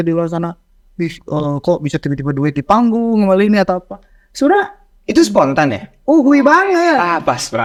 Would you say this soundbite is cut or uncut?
uncut